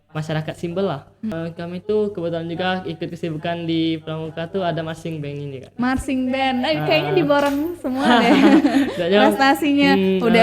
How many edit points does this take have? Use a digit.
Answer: 1